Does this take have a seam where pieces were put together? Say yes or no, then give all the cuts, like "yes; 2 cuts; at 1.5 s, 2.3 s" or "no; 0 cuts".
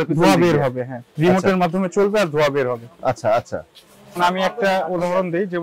yes; 1 cut; at 4.2 s